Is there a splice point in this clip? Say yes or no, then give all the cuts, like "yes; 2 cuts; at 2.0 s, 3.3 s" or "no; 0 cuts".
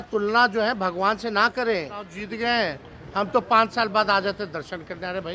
yes; 1 cut; at 2.2 s